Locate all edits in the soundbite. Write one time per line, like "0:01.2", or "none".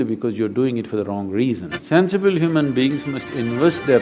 0:01.7